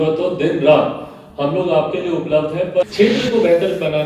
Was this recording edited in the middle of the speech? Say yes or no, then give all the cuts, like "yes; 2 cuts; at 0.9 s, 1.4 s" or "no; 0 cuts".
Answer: yes; 1 cut; at 2.9 s